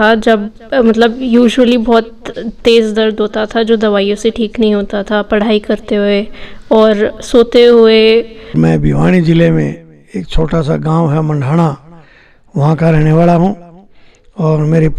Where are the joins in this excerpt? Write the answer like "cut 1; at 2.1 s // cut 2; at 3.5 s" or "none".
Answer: cut 1; at 8.4 s